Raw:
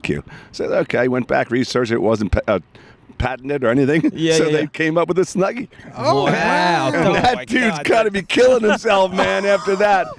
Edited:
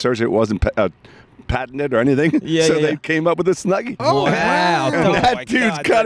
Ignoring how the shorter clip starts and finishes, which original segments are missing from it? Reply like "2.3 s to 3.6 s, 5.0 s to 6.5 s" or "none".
5.6 s to 5.9 s